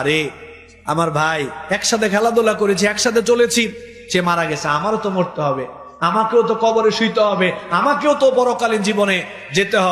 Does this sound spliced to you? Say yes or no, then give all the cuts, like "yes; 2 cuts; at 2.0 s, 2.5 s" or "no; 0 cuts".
no; 0 cuts